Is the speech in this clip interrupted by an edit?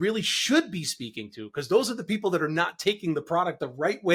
no; 0 cuts

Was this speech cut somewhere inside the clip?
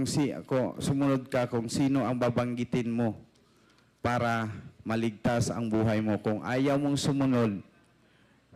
no; 0 cuts

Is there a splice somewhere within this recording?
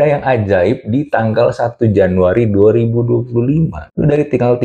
no; 0 cuts

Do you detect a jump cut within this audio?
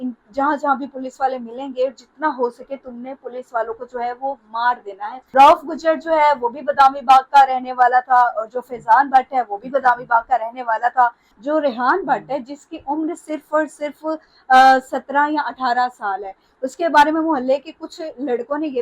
yes; 2 cuts; at 5.1 s, 11.3 s

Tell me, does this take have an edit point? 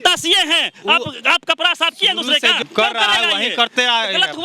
yes; 1 cut; at 2.6 s

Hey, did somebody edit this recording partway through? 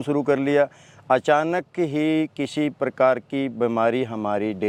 no; 0 cuts

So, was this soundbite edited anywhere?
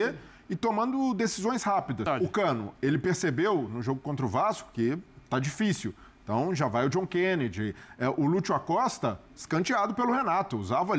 yes; 1 cut; at 2.1 s

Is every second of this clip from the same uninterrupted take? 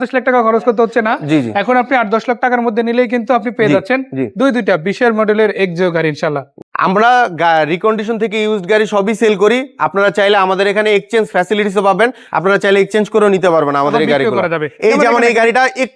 yes; 0 cuts

